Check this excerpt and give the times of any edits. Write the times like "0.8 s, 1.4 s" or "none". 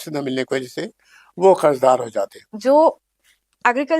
2.5 s